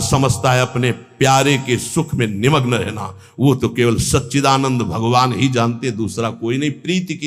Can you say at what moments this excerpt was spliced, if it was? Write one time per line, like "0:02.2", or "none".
none